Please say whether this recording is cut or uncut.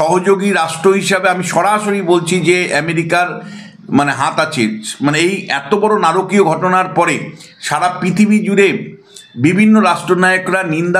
uncut